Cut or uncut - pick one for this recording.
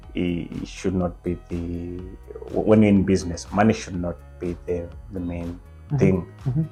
uncut